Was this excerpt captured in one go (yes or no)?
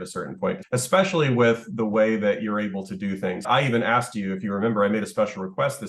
no